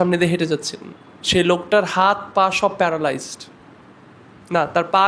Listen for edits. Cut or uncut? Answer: uncut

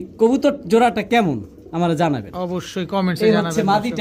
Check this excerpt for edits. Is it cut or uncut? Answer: uncut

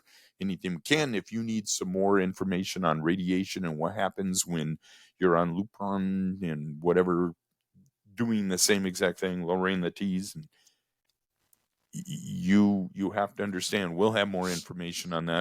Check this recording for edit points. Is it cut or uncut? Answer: uncut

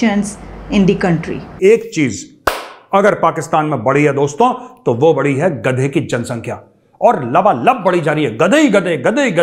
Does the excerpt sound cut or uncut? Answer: cut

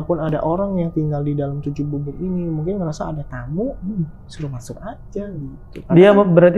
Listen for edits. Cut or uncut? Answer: uncut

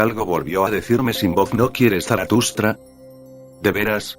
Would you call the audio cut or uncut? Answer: cut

